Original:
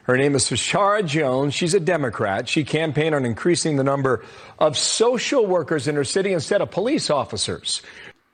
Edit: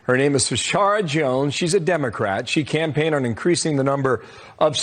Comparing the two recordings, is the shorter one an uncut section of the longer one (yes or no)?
yes